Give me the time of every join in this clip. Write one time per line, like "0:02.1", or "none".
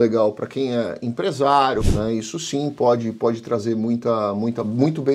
0:01.9